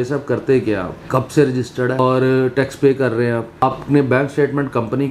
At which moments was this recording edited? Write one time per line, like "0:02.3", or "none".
0:00.9
0:02.0
0:03.6